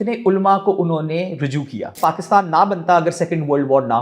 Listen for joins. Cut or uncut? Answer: cut